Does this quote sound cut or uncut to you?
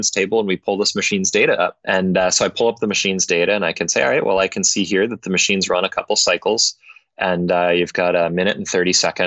cut